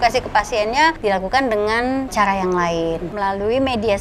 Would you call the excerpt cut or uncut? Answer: cut